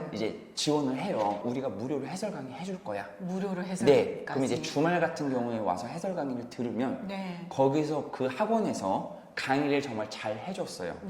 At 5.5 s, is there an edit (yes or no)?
no